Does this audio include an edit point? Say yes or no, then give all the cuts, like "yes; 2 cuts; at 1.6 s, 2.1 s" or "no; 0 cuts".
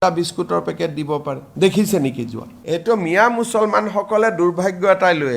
yes; 1 cut; at 2.5 s